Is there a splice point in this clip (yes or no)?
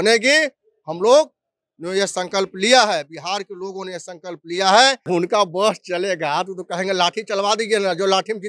yes